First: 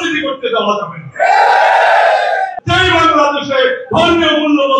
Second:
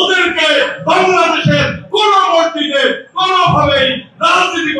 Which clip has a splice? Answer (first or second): first